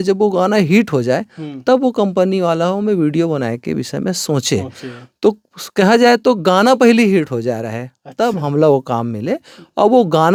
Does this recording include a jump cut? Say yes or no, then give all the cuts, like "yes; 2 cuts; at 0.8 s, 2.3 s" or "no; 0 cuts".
no; 0 cuts